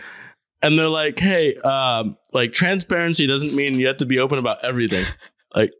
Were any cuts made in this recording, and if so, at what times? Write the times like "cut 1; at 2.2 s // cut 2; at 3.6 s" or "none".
none